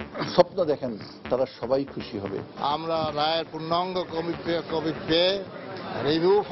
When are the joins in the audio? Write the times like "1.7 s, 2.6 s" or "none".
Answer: 2.5 s